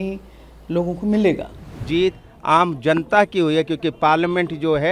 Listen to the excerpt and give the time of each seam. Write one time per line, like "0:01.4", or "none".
0:01.8